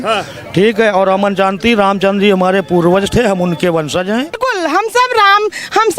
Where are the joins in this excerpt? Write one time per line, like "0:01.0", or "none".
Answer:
0:04.4

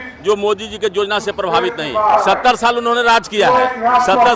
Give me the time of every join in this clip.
0:02.2

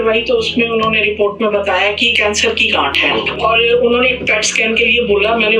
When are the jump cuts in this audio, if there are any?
0:02.1

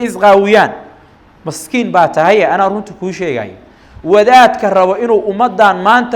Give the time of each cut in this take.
none

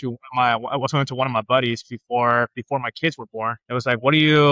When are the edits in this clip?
0:03.6

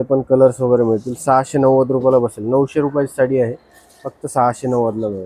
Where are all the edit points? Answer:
none

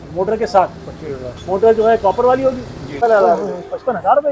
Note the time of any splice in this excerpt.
0:03.0

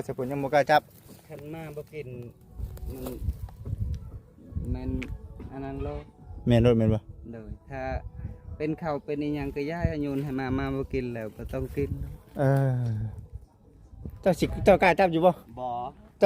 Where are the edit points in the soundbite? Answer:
0:14.0

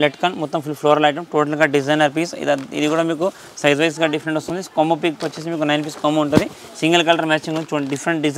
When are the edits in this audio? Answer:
none

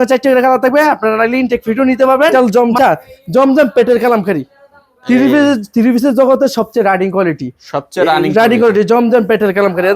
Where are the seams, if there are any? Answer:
0:02.3

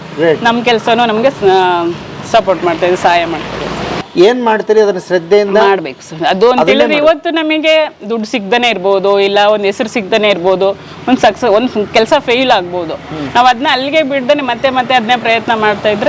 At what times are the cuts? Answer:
0:04.0

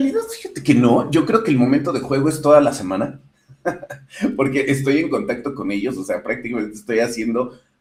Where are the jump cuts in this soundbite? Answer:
none

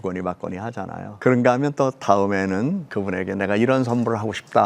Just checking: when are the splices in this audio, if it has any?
0:01.1
0:02.9

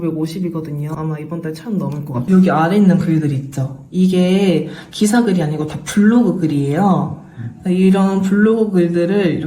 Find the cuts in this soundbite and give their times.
0:01.0
0:02.2

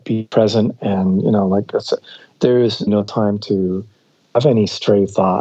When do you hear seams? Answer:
0:02.9
0:04.2

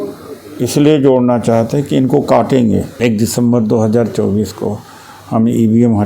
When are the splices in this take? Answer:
0:02.9

